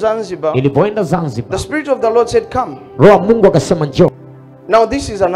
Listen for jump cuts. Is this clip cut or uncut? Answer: cut